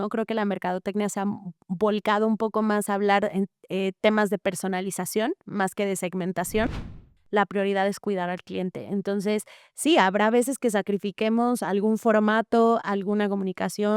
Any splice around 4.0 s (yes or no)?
no